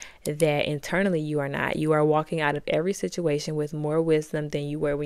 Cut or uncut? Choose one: uncut